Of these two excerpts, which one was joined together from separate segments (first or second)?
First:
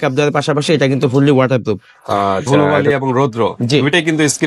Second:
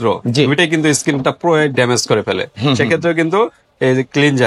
first